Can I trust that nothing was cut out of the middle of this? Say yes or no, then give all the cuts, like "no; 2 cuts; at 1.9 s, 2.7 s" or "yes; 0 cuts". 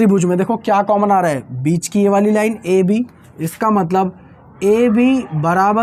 yes; 0 cuts